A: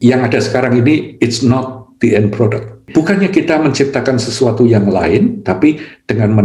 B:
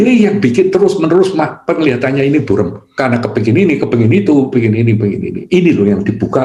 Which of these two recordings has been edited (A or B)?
A